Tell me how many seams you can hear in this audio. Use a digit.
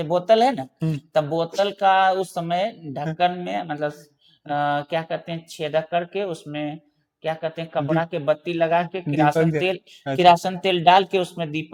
0